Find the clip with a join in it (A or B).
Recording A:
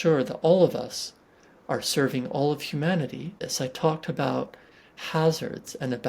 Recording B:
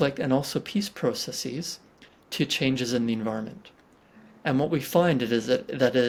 A